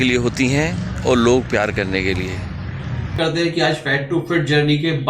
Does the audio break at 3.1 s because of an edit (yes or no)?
yes